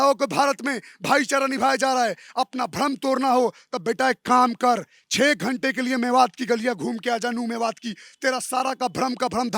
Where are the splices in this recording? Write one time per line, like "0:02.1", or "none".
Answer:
none